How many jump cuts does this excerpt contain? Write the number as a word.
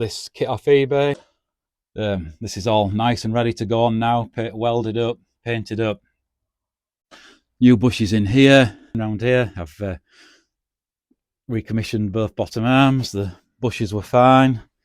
two